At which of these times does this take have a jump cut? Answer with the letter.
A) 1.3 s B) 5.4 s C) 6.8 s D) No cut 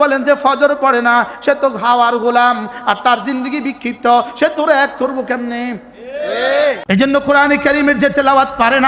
C